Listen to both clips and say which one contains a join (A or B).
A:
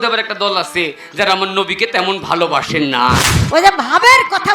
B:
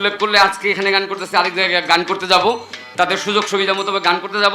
A